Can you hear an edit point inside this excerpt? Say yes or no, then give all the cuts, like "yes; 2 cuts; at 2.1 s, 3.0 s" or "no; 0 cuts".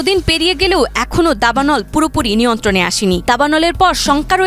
no; 0 cuts